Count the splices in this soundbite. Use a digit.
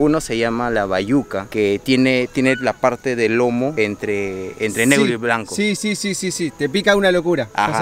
0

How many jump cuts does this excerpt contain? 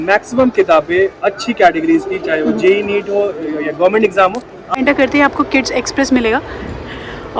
1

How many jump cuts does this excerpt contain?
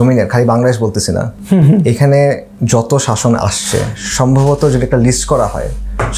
0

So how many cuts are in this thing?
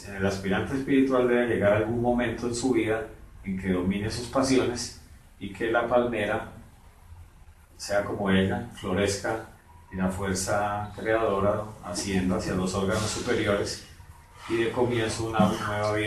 0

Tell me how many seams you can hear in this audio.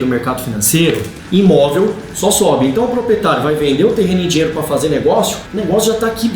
2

